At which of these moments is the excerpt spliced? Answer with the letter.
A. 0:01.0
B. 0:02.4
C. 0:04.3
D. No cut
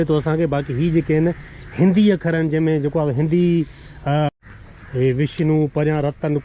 C